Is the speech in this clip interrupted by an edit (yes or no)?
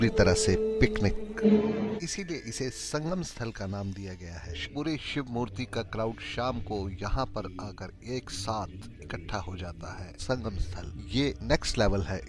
yes